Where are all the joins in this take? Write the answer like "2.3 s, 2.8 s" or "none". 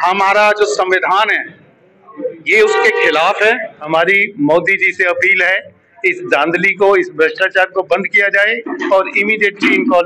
3.9 s